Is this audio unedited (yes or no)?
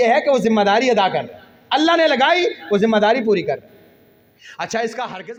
yes